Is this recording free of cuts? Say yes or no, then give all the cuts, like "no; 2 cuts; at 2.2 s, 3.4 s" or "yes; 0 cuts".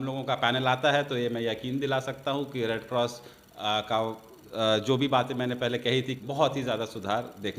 no; 1 cut; at 6.2 s